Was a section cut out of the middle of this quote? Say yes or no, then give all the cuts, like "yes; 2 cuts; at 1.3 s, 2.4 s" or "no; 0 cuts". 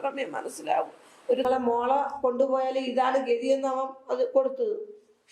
yes; 1 cut; at 1.5 s